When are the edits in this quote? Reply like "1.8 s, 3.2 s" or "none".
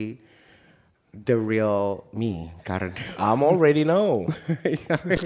none